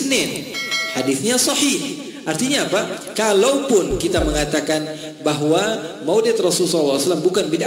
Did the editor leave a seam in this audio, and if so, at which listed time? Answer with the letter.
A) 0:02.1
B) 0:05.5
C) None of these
C